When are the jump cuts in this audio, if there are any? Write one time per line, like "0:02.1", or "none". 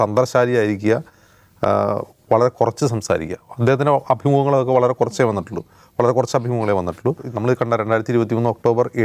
0:07.3